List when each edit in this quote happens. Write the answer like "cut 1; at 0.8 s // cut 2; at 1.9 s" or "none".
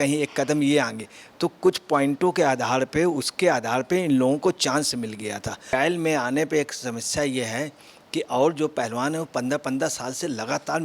cut 1; at 5.7 s